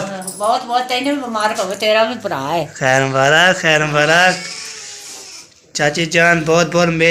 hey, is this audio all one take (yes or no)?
yes